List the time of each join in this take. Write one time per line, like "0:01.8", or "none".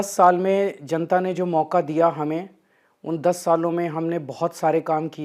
none